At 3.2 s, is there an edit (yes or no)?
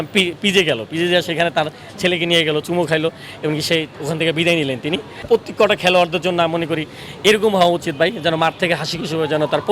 no